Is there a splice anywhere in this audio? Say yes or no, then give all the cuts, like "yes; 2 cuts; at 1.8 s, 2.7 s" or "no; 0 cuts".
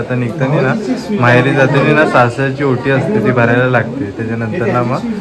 no; 0 cuts